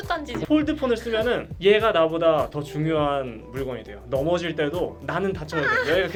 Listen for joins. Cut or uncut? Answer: uncut